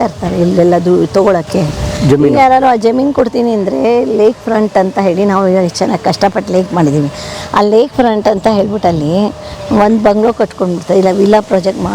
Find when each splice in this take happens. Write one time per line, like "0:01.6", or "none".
none